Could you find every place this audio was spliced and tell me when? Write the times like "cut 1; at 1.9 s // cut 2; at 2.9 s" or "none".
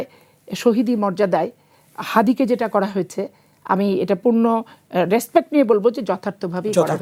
none